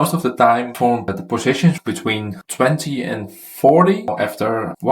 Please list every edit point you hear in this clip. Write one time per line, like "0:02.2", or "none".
0:01.1
0:04.1

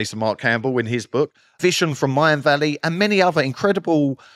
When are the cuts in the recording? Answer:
0:01.4

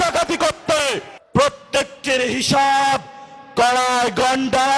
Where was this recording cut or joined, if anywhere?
0:01.1

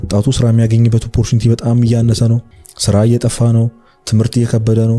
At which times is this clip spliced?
0:02.5

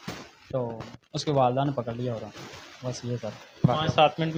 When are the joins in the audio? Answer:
none

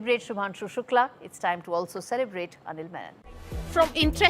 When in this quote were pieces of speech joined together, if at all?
0:03.1

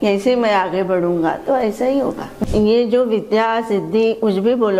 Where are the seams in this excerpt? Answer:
0:02.3

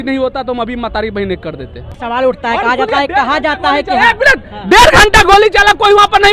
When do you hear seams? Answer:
0:01.9

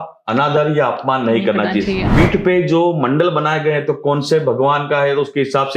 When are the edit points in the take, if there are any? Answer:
0:02.1

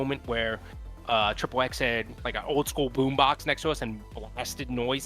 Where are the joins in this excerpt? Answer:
0:02.3

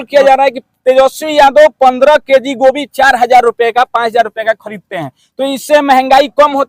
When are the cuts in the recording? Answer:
none

